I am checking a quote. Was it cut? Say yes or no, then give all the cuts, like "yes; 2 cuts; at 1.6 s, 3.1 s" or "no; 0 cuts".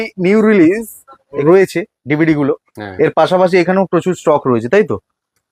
yes; 1 cut; at 1.4 s